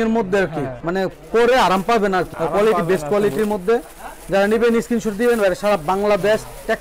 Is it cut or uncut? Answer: uncut